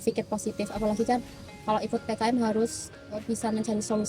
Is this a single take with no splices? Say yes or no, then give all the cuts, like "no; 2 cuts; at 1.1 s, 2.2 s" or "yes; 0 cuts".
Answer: yes; 0 cuts